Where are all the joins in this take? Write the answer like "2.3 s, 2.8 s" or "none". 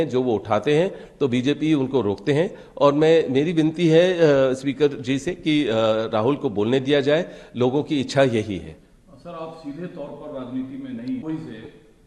none